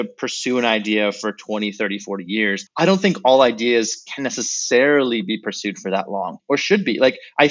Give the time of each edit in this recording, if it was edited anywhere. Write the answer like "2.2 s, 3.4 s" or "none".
none